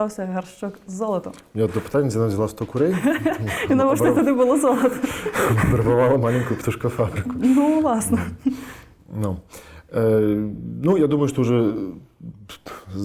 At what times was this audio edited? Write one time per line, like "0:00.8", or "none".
none